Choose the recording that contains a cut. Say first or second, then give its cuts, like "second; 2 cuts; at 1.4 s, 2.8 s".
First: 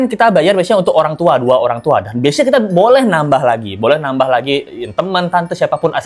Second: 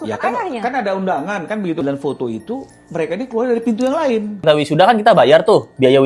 second; 2 cuts; at 1.8 s, 4.4 s